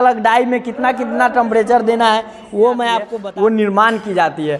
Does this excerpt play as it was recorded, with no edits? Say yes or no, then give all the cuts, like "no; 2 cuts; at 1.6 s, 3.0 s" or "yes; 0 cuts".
no; 1 cut; at 3.1 s